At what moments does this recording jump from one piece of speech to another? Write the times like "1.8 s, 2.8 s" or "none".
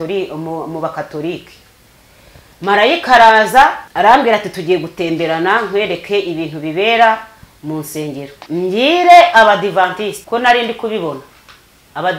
3.8 s, 8.4 s, 10.2 s